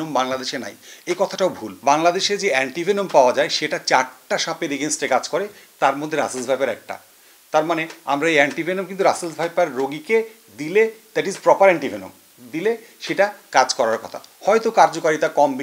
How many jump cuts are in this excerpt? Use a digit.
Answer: 1